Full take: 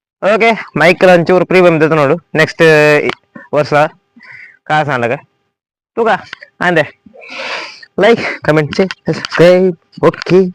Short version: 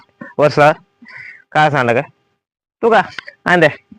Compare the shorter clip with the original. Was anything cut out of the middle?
no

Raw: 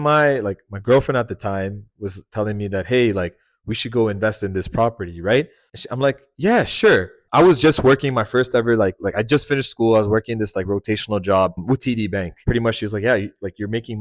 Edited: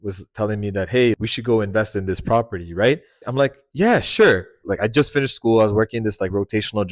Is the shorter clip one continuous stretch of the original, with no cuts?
no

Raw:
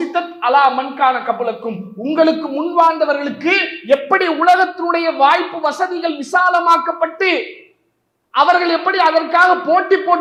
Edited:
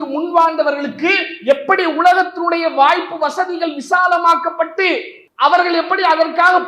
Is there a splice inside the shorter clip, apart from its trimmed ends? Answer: yes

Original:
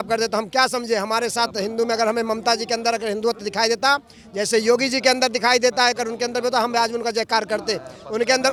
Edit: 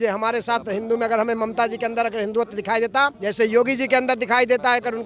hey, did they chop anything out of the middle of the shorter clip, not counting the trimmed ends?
yes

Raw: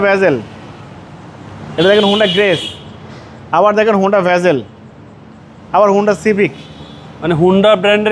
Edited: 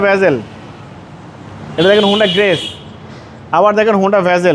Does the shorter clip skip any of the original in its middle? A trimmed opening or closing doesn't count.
no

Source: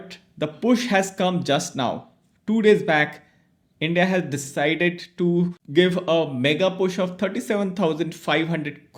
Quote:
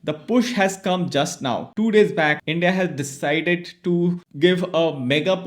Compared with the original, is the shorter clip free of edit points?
no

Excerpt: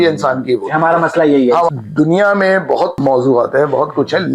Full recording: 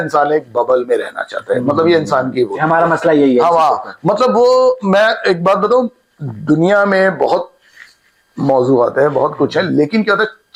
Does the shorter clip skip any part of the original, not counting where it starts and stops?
yes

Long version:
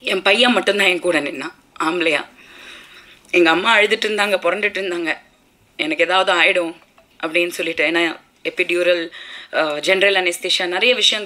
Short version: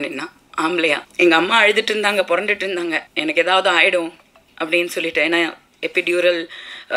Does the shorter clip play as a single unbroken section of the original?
no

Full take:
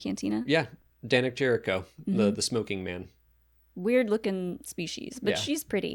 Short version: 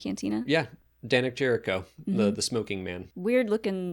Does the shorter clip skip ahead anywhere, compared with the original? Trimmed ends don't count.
yes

